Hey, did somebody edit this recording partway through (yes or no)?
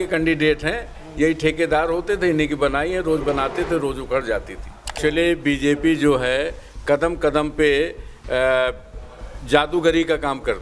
yes